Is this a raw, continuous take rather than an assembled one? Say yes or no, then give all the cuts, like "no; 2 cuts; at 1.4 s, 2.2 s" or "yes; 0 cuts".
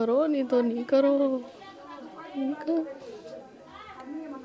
yes; 0 cuts